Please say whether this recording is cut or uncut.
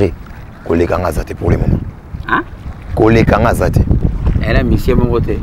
cut